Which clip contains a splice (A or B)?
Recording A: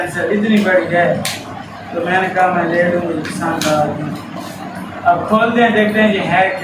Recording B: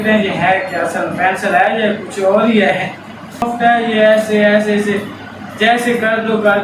B